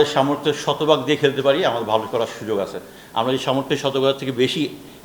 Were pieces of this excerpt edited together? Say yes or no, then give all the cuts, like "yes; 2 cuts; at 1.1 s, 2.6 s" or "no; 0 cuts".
no; 0 cuts